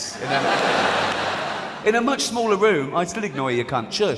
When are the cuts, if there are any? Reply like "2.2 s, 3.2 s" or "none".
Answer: none

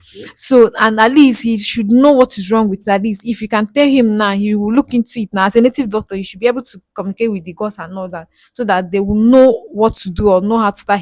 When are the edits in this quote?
none

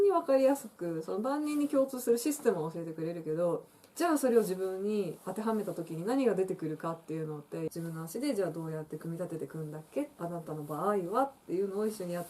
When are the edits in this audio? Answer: 7.7 s, 10.1 s

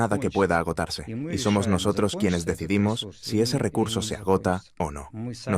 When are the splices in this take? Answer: 1.2 s

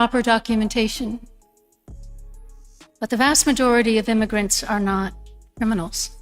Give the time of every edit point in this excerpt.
1.2 s, 2.7 s

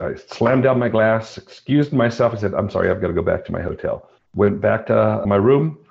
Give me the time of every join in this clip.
4.1 s

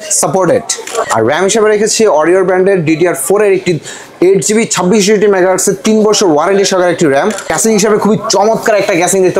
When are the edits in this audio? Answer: 1.1 s, 7.5 s

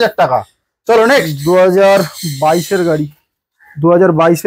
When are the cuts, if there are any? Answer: none

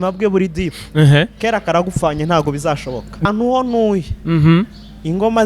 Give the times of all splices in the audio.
3.2 s

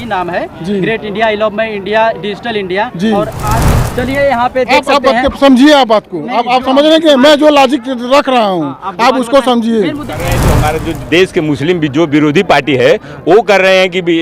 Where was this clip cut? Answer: 3.7 s, 10.5 s

